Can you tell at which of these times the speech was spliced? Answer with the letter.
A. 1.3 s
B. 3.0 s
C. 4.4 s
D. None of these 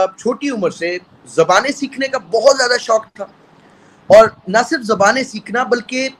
D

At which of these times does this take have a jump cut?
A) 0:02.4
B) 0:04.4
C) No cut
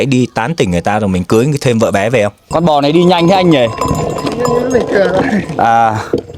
A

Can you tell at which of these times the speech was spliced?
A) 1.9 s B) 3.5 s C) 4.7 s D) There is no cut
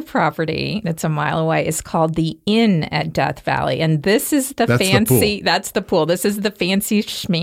D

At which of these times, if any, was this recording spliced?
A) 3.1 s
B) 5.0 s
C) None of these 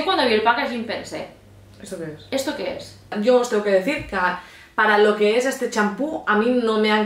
A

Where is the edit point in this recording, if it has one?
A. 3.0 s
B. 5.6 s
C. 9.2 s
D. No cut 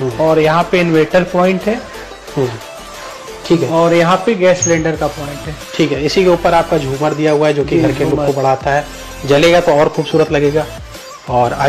D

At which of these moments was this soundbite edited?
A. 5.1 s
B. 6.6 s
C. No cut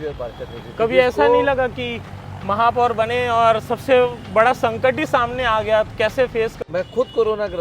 B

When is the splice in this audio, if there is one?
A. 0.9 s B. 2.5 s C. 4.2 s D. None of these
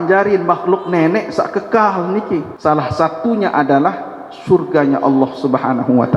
B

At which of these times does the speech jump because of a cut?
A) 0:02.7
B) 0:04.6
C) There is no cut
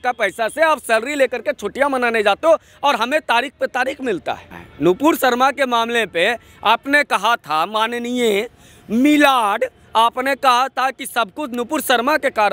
B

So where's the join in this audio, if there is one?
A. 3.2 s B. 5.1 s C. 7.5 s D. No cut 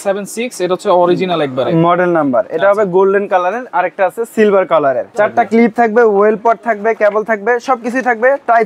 B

